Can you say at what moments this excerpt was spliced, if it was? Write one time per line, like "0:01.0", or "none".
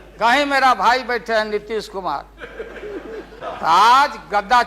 0:03.4